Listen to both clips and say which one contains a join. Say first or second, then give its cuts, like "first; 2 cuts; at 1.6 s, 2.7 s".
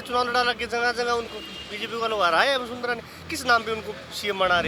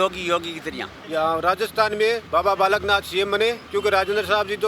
second; 3 cuts; at 0.9 s, 2.2 s, 3.6 s